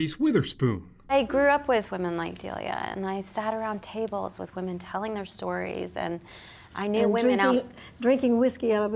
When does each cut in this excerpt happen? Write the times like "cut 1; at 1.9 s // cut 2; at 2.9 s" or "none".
cut 1; at 0.9 s